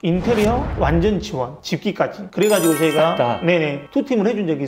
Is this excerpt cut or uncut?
uncut